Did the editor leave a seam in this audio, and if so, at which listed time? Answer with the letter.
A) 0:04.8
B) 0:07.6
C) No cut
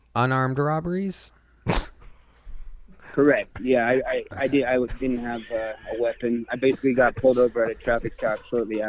C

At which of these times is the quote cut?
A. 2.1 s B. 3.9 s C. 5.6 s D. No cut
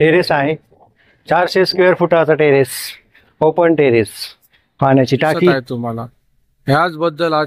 C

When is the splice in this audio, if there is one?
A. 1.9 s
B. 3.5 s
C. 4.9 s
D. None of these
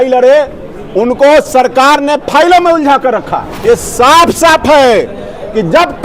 B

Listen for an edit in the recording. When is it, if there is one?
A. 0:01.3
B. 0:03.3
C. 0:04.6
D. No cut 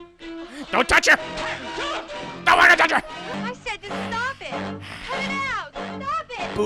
B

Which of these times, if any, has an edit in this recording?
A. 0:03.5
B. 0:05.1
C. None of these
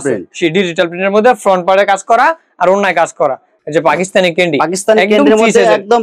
A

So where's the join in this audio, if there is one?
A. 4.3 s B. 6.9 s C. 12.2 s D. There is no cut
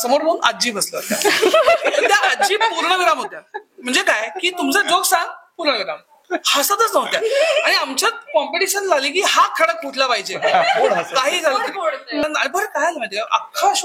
C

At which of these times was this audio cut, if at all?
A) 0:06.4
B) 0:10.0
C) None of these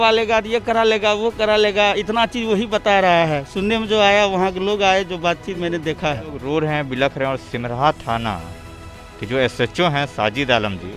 A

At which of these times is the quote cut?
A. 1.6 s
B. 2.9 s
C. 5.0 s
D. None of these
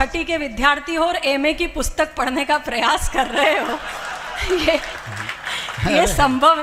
D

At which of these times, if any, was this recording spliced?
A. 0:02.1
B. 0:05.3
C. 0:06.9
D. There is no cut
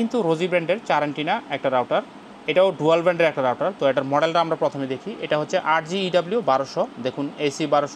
D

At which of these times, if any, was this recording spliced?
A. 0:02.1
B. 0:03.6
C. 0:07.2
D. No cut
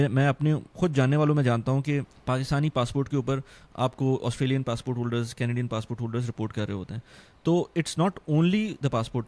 A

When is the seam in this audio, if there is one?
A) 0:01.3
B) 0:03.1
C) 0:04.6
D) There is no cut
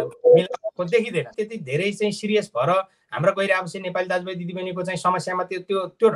A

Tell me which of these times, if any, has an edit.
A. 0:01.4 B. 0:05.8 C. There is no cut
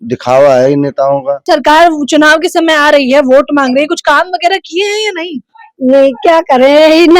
A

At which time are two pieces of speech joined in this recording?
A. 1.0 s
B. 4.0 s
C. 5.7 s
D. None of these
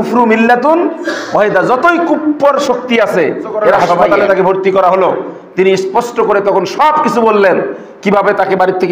B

